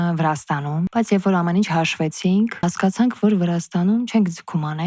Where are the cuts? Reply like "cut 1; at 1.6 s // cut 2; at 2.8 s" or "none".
cut 1; at 0.9 s // cut 2; at 2.6 s